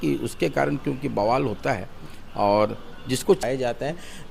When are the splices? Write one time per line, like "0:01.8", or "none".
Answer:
0:03.4